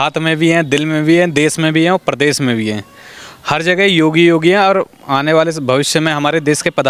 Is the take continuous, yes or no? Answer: yes